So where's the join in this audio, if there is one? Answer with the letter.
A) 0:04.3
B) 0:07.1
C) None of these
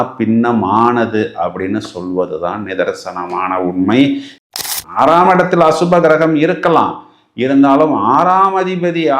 A